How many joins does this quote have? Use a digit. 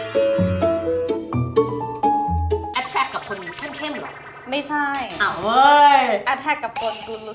1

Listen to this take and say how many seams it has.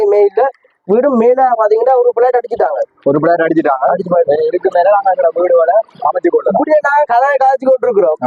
0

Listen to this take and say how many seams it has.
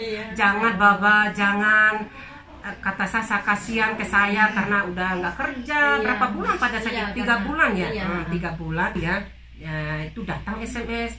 1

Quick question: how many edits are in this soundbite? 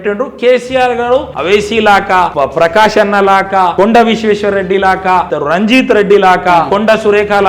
5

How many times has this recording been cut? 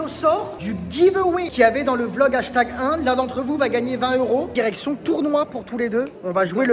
1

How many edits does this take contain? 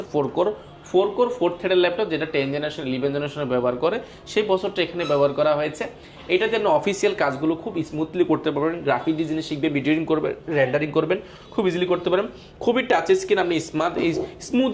0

